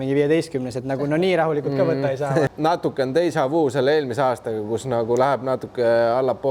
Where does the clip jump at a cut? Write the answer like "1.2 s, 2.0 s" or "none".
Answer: 2.5 s